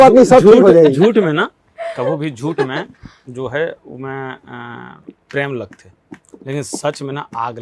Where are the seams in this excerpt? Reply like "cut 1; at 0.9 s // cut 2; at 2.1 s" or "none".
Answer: none